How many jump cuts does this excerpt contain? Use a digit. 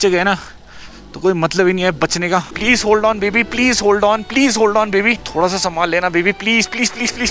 1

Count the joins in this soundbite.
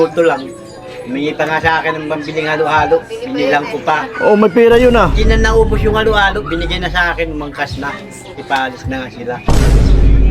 1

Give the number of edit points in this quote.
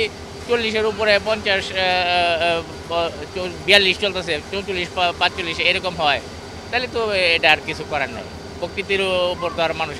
0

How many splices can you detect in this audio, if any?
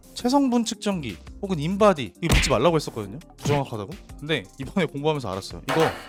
0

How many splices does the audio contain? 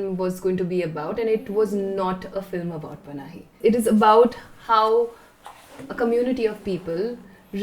1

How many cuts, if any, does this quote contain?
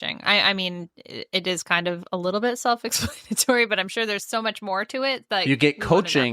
1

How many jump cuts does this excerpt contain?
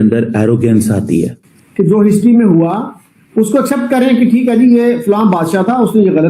1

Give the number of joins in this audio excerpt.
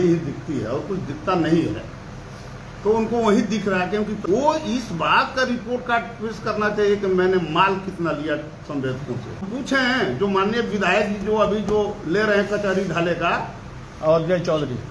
2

